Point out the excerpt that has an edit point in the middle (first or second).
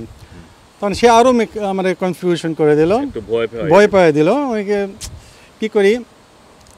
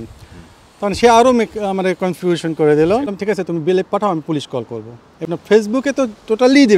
second